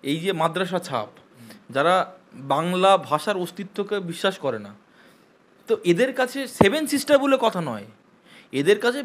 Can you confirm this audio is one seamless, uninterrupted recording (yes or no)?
yes